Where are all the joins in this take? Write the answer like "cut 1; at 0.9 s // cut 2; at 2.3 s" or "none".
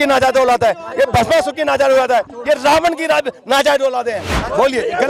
none